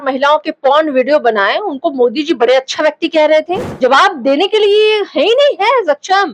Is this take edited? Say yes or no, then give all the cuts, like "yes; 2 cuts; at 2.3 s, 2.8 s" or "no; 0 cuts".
yes; 1 cut; at 3.7 s